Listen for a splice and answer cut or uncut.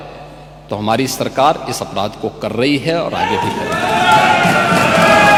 uncut